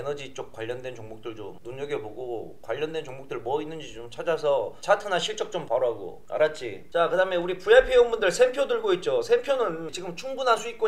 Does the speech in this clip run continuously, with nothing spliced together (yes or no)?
yes